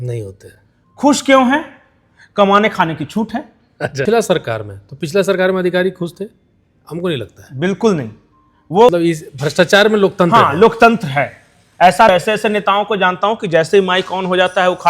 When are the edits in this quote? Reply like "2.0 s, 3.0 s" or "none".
4.0 s, 8.9 s, 12.1 s